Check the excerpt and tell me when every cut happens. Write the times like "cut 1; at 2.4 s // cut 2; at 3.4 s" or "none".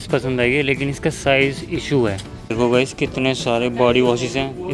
cut 1; at 2.3 s